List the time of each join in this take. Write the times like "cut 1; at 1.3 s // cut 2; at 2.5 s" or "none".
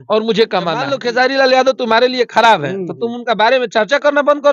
cut 1; at 0.9 s

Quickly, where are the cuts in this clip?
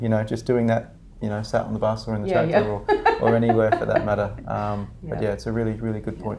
none

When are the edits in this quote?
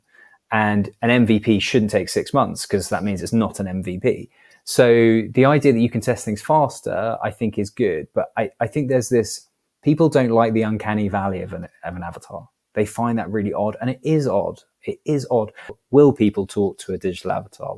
cut 1; at 15.8 s

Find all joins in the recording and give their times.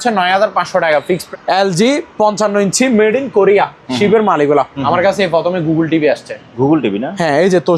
cut 1; at 1.2 s // cut 2; at 4.7 s

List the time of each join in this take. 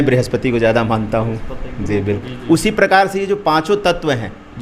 cut 1; at 2.0 s

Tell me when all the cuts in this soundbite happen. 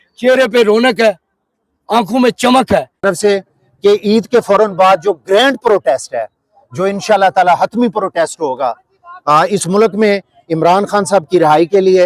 cut 1; at 3.0 s

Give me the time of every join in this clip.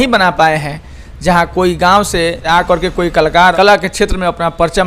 cut 1; at 2.4 s // cut 2; at 3.5 s

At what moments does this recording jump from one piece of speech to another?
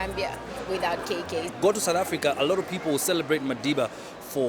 none

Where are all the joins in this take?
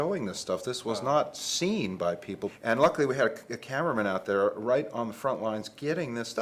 cut 1; at 2.5 s

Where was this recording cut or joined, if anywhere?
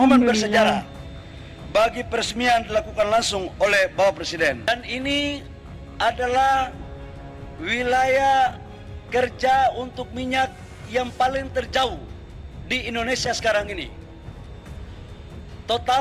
cut 1; at 4.6 s

